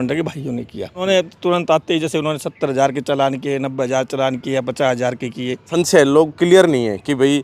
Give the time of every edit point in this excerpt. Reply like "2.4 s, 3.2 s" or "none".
1.0 s, 5.7 s